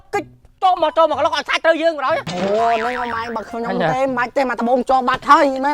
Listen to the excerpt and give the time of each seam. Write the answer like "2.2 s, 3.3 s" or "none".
none